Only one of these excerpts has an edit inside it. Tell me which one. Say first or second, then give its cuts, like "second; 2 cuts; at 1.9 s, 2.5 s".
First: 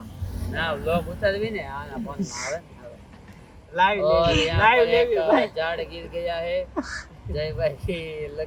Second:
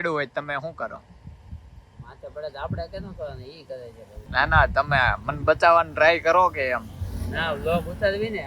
second; 1 cut; at 4.2 s